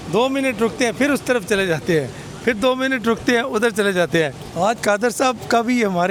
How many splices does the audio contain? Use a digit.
0